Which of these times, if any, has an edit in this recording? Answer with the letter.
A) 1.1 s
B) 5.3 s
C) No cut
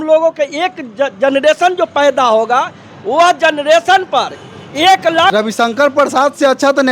B